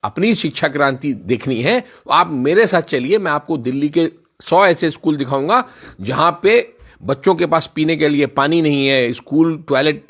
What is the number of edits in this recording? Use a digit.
0